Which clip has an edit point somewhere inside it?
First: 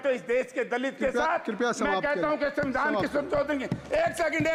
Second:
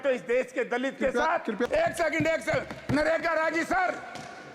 second; 1 cut; at 1.7 s

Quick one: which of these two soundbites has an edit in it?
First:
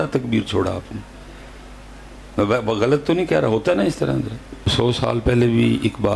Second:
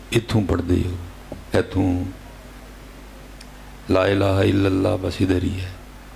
first; 1 cut; at 4.7 s

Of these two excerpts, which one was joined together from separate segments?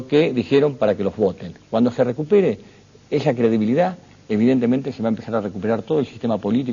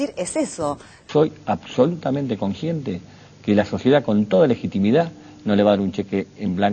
second; 1 cut; at 1.1 s

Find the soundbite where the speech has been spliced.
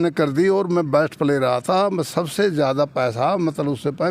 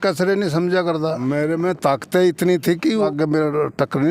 second; 2 cuts; at 1.2 s, 3.1 s

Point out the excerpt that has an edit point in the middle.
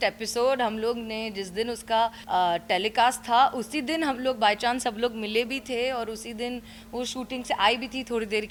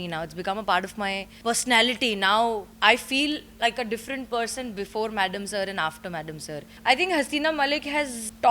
second; 2 cuts; at 1.3 s, 6.7 s

